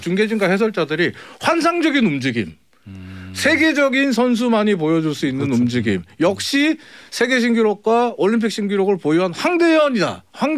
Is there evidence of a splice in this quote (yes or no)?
no